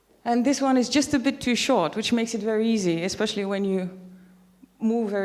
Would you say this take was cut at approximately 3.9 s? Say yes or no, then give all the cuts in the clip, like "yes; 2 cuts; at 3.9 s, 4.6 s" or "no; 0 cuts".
yes; 1 cut; at 3.9 s